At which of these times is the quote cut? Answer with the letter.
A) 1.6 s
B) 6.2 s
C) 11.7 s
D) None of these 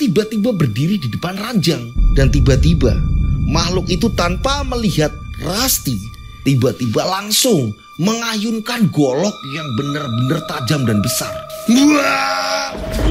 B